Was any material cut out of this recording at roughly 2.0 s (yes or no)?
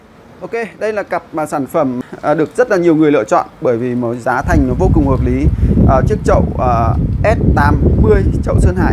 yes